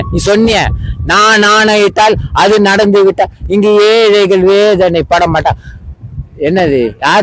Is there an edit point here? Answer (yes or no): no